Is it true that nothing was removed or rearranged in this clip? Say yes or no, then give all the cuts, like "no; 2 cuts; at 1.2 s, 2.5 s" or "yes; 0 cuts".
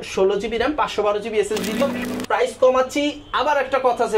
no; 1 cut; at 1.8 s